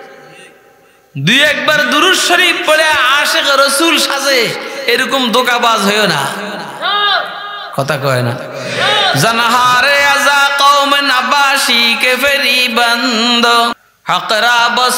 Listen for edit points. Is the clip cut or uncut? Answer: cut